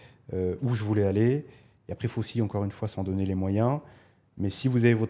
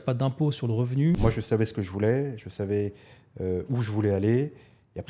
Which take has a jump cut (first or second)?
second